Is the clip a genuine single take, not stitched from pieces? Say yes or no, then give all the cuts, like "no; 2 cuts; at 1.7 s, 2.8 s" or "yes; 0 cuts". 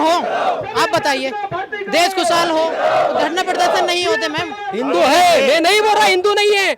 no; 1 cut; at 4.6 s